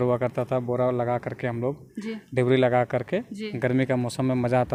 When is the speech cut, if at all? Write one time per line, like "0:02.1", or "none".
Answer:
none